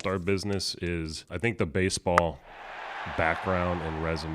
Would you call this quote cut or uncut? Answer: cut